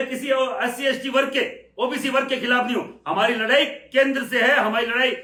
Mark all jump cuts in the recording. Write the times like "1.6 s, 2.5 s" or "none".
none